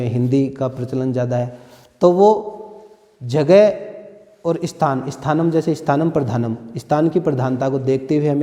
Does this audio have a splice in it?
no; 0 cuts

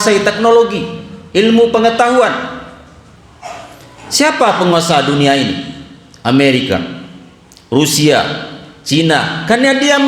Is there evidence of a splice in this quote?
yes; 1 cut; at 3.2 s

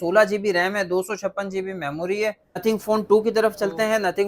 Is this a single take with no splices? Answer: no; 1 cut; at 2.6 s

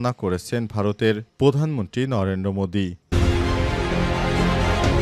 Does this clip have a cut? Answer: yes; 1 cut; at 3.0 s

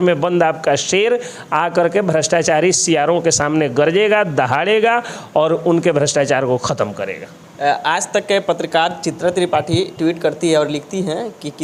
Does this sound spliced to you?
no; 0 cuts

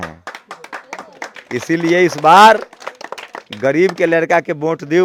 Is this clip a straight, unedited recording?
yes; 0 cuts

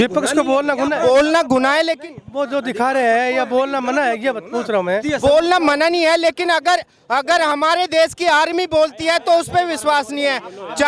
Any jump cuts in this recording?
no; 0 cuts

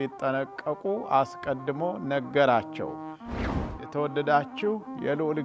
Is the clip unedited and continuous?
no; 1 cut; at 3.5 s

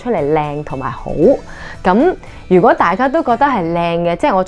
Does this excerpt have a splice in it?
no; 0 cuts

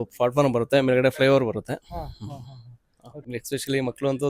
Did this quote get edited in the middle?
yes; 1 cut; at 3.1 s

